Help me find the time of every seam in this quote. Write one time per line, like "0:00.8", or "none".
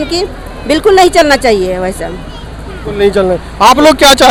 none